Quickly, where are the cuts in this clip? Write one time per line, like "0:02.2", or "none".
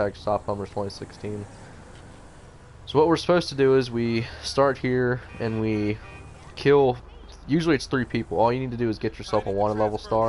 0:02.8